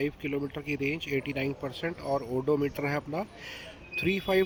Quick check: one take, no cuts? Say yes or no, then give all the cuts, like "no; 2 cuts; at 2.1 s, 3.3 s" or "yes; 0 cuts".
yes; 0 cuts